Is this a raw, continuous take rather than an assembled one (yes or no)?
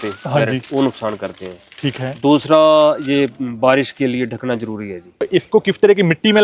no